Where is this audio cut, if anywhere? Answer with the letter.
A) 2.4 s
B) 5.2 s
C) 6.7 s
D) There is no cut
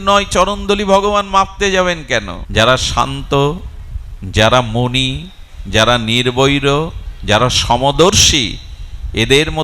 A